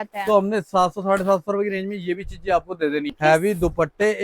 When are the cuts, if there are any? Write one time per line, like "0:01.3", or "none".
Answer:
0:03.1